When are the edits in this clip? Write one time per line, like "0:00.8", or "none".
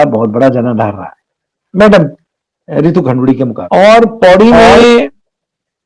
0:03.6